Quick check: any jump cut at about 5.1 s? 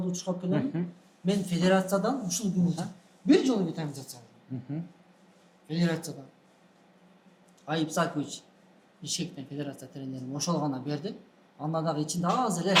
no; 0 cuts

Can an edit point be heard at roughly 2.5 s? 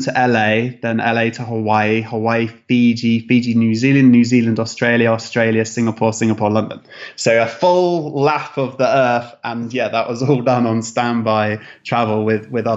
no; 0 cuts

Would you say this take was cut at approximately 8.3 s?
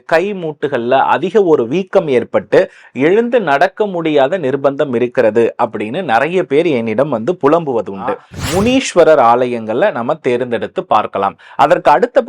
yes; 1 cut; at 8.3 s

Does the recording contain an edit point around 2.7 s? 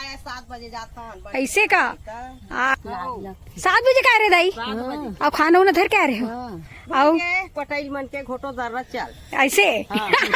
yes; 1 cut; at 2.7 s

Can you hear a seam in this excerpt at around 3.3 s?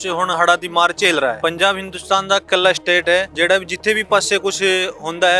yes; 2 cuts; at 1.4 s, 3.3 s

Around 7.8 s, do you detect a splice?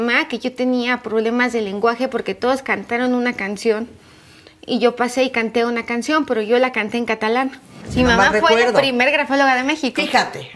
yes; 1 cut; at 7.8 s

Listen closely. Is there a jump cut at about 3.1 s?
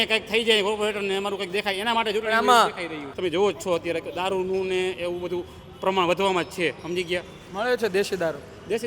yes; 1 cut; at 3.1 s

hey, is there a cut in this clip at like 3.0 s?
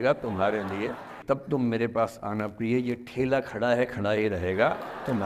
no; 1 cut; at 1.2 s

